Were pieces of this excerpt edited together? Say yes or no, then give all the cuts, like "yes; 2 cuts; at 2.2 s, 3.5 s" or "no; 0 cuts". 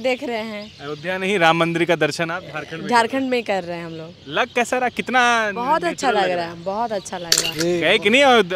yes; 1 cut; at 7.4 s